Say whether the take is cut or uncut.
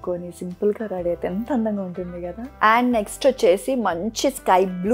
cut